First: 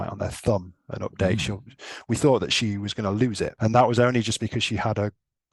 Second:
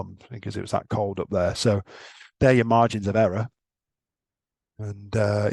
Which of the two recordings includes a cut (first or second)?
first